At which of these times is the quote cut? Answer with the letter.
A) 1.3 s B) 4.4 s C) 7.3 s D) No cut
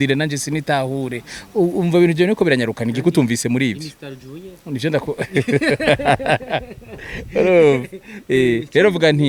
D